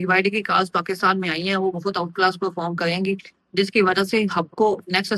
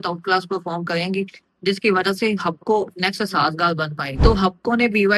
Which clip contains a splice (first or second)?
second